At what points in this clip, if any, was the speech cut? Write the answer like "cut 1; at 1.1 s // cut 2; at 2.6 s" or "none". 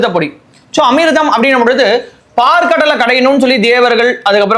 none